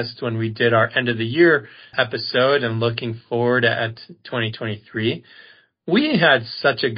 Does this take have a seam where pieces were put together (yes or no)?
no